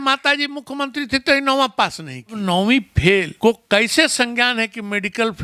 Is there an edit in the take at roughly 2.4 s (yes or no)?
yes